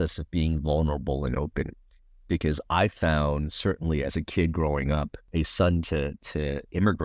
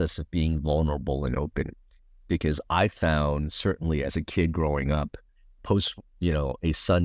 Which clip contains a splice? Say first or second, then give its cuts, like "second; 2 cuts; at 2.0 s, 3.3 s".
first; 1 cut; at 5.3 s